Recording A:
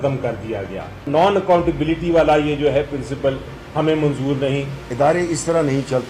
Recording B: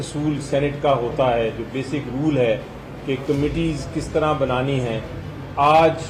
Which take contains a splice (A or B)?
A